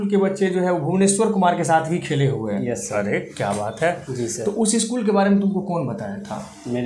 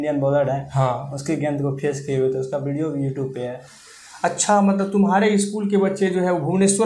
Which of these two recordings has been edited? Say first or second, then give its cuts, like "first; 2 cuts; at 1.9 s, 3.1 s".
first; 1 cut; at 4.1 s